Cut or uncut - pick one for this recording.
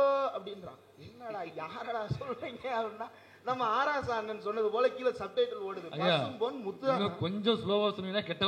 uncut